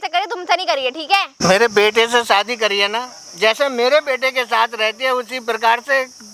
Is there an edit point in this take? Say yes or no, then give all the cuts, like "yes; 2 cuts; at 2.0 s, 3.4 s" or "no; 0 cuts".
no; 0 cuts